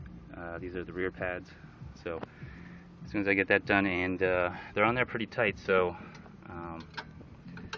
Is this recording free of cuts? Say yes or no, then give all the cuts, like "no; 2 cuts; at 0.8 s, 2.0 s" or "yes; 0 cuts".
no; 1 cut; at 5.6 s